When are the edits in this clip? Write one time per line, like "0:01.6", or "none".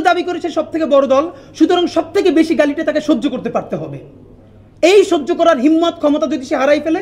none

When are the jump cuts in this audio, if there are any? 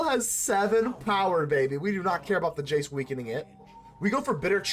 0:03.8

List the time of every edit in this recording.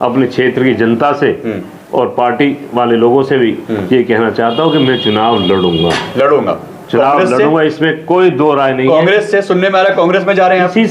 none

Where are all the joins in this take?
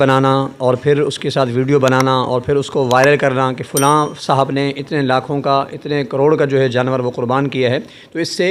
none

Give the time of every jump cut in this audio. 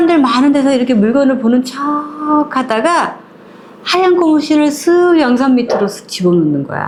none

